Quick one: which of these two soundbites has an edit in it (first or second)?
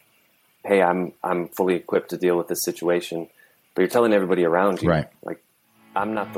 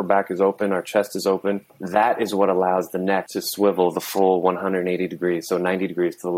second